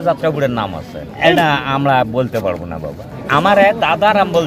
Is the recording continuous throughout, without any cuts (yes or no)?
no